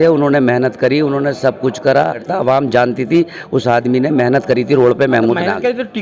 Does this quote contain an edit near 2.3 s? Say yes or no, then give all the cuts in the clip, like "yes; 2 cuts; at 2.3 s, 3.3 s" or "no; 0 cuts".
yes; 1 cut; at 2.3 s